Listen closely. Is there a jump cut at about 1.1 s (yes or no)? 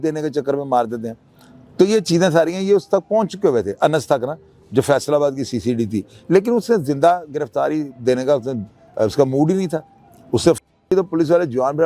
no